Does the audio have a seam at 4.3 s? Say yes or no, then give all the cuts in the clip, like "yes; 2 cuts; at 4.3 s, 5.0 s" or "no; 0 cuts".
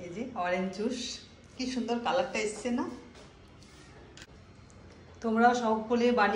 yes; 1 cut; at 4.3 s